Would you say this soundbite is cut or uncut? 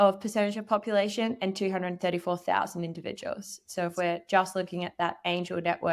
uncut